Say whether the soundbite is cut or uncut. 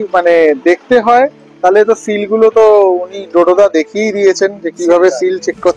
uncut